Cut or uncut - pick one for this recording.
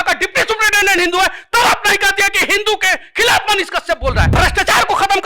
cut